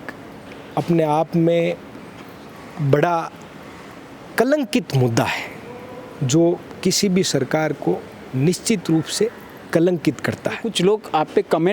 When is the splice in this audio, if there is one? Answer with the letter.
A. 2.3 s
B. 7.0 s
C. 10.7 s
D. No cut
C